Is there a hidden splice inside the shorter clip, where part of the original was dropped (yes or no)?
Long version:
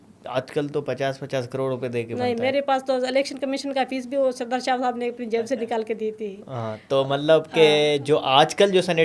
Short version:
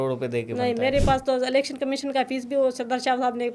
no